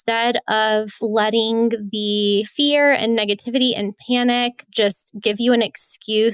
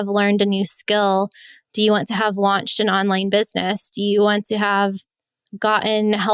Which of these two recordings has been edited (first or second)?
first